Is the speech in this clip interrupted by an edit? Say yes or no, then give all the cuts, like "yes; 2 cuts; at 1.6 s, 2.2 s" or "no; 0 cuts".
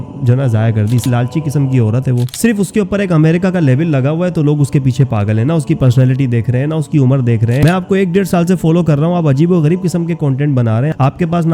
yes; 2 cuts; at 1.0 s, 7.6 s